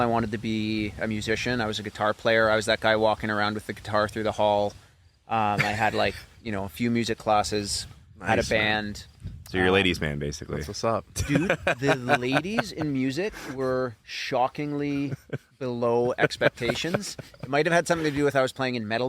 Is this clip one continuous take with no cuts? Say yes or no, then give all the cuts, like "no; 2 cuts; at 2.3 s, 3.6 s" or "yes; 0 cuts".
yes; 0 cuts